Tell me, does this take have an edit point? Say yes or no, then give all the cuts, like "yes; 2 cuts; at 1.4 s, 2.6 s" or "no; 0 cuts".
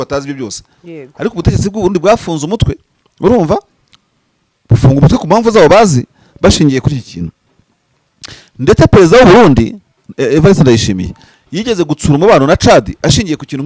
no; 0 cuts